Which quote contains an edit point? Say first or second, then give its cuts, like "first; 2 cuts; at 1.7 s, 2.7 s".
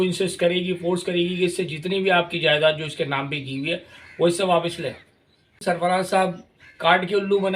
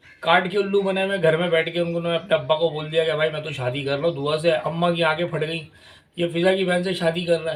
first; 1 cut; at 5.6 s